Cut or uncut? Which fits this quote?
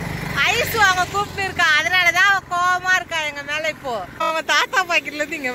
cut